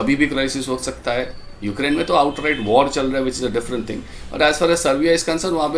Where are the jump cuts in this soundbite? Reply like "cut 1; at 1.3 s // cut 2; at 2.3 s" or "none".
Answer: none